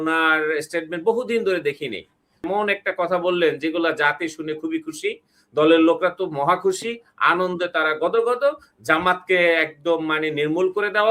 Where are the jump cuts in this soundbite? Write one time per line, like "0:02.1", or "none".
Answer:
0:02.4